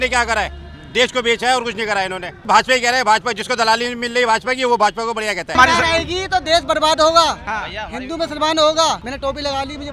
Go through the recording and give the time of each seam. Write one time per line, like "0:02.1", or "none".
0:02.3
0:05.6
0:09.0